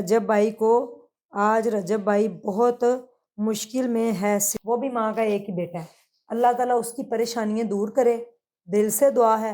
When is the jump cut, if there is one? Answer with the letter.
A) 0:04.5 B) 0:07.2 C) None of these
A